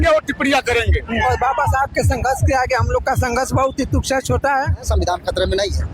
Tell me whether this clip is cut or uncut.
cut